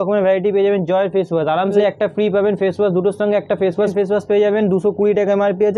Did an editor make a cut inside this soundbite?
yes; 2 cuts; at 1.8 s, 3.9 s

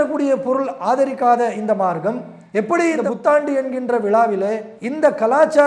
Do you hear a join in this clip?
no; 0 cuts

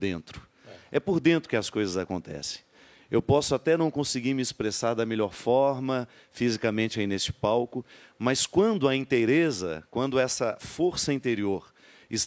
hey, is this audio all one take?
yes; 0 cuts

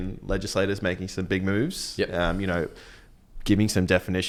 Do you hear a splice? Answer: no; 0 cuts

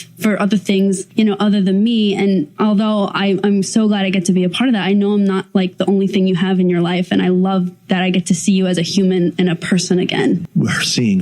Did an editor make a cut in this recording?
yes; 3 cuts; at 1.0 s, 2.5 s, 10.5 s

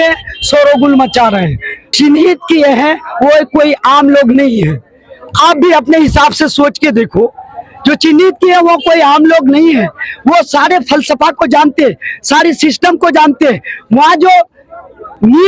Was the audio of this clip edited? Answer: no; 0 cuts

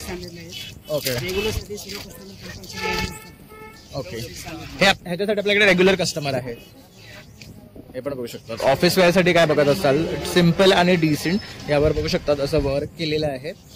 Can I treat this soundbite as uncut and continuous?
yes; 0 cuts

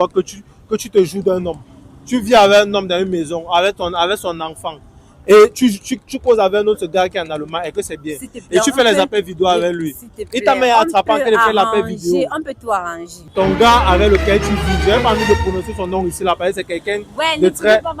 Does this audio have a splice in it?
yes; 1 cut; at 13.3 s

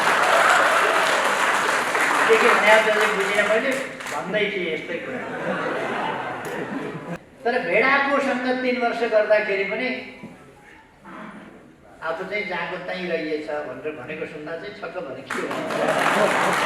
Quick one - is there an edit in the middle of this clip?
yes; 1 cut; at 7.2 s

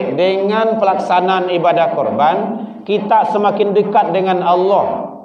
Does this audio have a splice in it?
no; 0 cuts

